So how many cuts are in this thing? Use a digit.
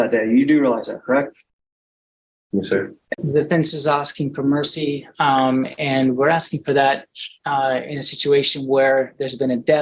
1